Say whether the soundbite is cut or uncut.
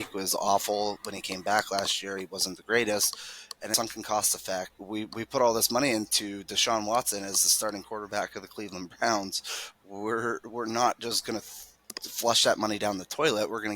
cut